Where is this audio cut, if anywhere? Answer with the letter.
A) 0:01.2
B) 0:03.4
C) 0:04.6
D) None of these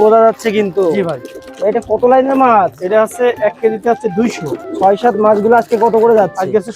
C